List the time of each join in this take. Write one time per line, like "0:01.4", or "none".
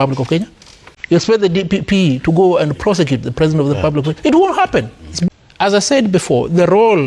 0:05.3